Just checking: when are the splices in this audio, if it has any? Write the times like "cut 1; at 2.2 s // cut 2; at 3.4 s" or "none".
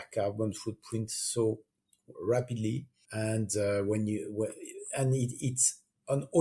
none